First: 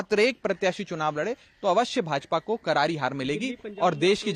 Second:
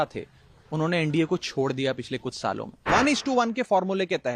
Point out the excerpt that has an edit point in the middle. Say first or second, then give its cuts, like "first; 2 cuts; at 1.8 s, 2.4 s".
second; 1 cut; at 2.9 s